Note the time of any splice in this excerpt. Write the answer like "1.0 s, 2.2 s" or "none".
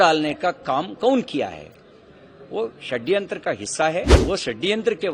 4.1 s